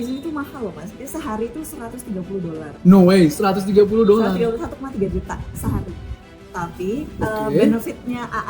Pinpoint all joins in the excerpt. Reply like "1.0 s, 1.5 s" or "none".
2.7 s